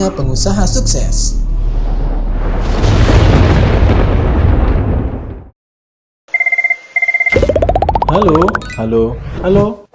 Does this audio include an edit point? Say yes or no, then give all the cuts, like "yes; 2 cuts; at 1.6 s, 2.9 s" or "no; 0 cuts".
yes; 1 cut; at 6.2 s